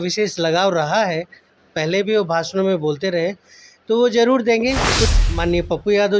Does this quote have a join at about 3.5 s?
no; 1 cut; at 5.1 s

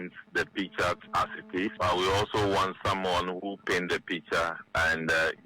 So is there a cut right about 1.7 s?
yes; 1 cut; at 1.7 s

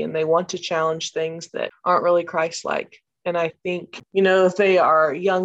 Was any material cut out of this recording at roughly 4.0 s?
yes; 2 cuts; at 1.7 s, 4.0 s

